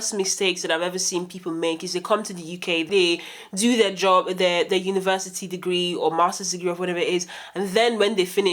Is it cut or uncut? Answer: cut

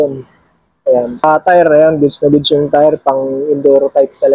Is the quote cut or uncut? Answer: cut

